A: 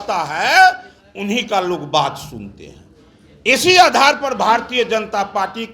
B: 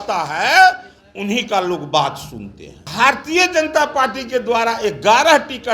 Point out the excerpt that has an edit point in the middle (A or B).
B